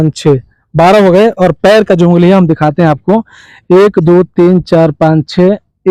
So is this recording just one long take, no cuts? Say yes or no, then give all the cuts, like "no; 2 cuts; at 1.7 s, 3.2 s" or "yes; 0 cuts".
yes; 0 cuts